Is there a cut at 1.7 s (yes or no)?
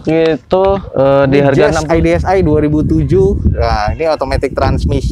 yes